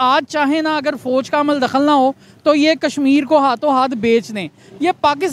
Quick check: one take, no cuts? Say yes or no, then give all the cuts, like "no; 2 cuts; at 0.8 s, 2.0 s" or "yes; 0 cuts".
yes; 0 cuts